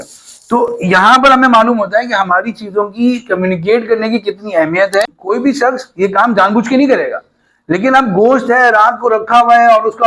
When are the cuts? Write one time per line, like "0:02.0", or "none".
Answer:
0:05.2